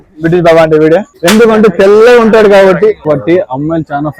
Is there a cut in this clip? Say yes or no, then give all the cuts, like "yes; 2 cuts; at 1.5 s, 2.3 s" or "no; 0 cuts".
yes; 2 cuts; at 1.1 s, 3.1 s